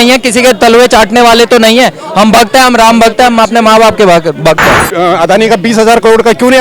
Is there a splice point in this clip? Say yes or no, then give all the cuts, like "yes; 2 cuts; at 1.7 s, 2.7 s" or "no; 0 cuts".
yes; 1 cut; at 4.8 s